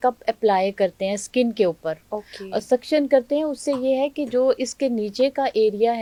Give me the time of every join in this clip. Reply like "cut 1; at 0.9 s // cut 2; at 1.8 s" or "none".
none